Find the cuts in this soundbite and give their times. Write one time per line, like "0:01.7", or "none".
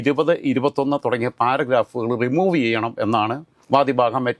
none